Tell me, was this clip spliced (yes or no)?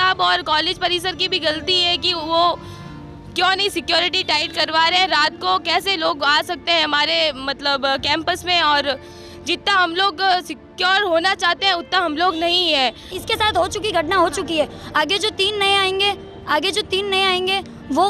yes